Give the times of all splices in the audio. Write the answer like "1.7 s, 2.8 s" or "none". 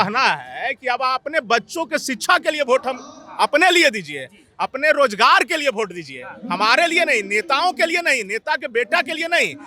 none